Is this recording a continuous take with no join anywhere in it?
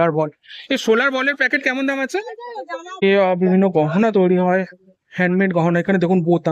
no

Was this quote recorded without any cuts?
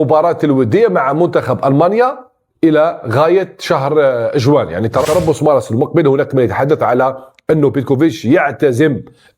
no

